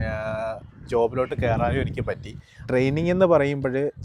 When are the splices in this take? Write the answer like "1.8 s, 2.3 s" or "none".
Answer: 2.6 s